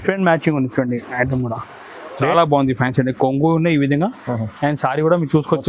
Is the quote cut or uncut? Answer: cut